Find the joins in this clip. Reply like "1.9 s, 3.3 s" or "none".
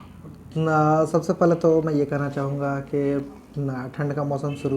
3.9 s